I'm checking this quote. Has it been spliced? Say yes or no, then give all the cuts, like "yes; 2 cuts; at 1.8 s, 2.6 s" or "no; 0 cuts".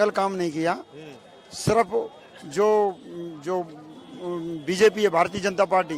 no; 0 cuts